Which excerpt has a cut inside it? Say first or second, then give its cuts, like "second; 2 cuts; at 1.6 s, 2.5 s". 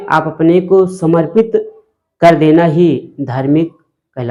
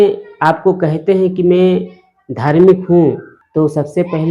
second; 1 cut; at 3.3 s